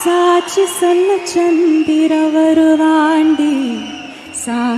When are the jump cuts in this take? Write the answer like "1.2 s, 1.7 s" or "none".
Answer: none